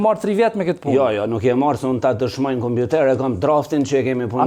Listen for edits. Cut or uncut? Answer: uncut